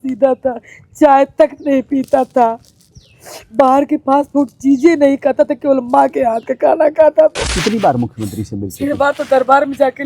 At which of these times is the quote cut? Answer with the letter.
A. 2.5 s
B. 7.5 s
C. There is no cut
B